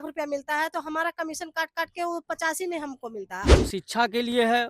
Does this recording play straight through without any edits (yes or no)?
no